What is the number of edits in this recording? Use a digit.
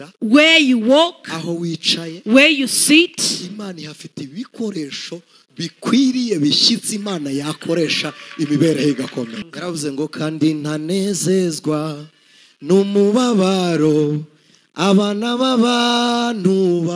1